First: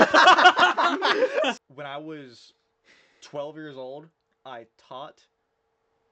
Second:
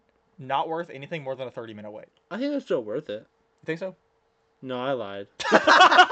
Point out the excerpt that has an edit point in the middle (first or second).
first